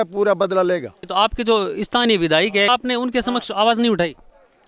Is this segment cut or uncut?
cut